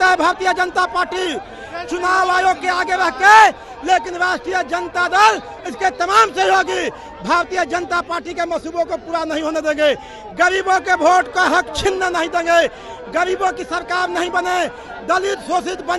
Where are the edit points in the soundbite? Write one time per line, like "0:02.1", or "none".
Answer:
none